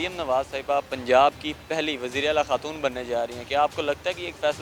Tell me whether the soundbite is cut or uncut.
uncut